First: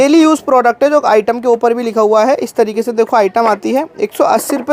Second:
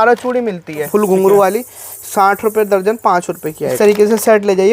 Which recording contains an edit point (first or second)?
second